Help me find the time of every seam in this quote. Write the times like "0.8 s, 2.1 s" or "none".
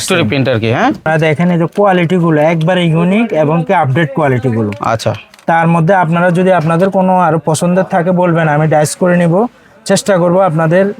1.1 s